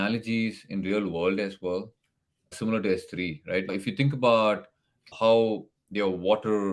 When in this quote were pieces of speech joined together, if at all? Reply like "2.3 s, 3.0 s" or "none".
2.5 s, 3.7 s, 5.1 s